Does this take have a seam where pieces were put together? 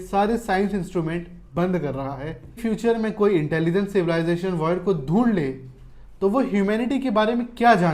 yes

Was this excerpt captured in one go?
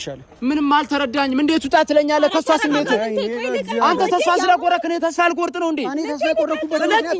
yes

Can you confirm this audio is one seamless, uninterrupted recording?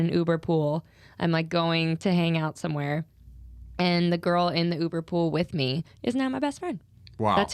yes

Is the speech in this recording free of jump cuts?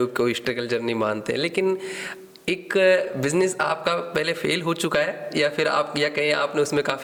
yes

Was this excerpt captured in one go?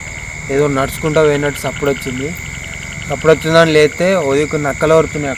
yes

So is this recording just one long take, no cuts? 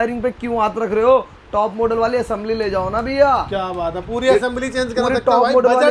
yes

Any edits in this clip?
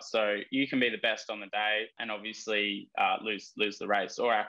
yes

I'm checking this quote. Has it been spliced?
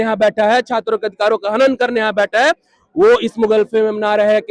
no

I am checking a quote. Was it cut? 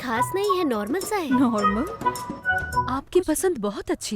yes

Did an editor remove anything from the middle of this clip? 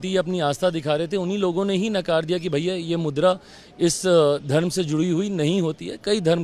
no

